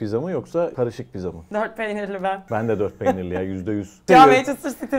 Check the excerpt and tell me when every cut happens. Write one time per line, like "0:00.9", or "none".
0:01.0
0:02.4
0:04.1